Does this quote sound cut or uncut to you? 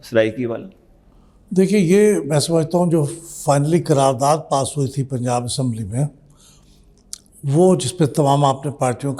uncut